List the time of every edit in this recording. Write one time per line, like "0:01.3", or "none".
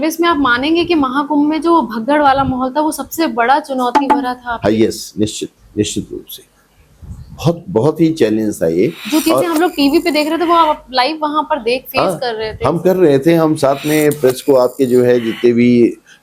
none